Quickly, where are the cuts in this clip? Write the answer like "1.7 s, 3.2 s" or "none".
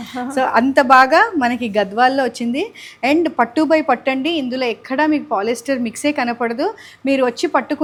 none